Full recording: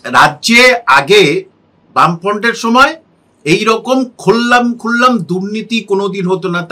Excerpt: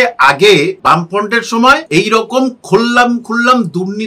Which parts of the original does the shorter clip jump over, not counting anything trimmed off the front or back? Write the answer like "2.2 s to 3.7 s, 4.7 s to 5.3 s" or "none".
1.5 s to 1.9 s, 3.0 s to 3.4 s